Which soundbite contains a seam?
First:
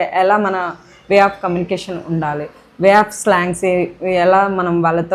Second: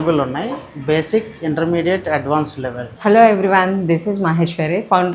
second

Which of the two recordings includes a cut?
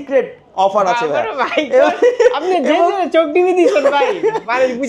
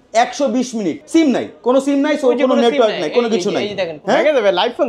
second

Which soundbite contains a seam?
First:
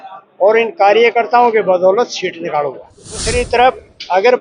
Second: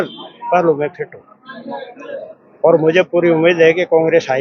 first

